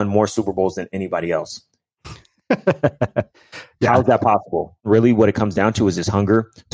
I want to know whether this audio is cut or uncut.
cut